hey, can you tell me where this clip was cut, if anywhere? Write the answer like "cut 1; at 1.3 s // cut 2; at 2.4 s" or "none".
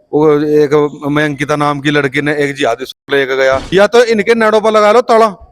cut 1; at 3.6 s